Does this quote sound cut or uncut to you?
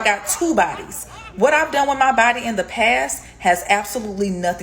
uncut